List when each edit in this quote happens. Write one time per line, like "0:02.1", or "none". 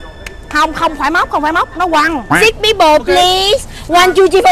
0:02.3